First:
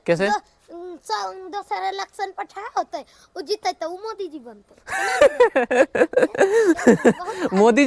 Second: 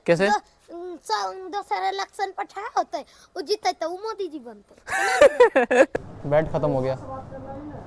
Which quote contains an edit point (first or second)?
second